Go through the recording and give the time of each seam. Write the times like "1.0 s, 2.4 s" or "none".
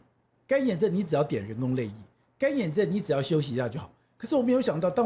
none